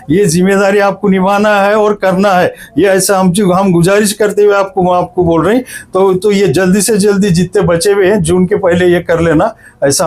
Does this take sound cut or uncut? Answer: uncut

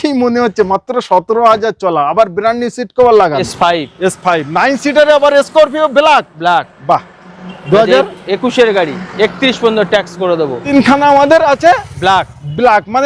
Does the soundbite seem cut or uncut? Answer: cut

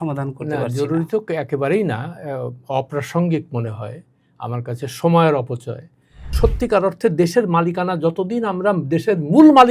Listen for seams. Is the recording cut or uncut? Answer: cut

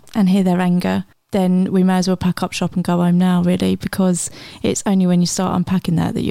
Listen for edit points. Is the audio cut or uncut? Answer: uncut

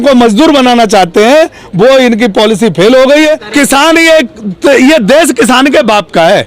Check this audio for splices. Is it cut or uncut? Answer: cut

